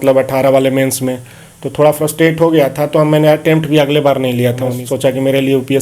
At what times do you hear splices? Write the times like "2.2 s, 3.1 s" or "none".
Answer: 4.7 s